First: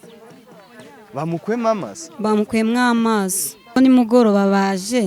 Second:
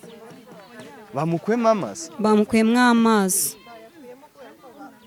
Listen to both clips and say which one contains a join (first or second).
first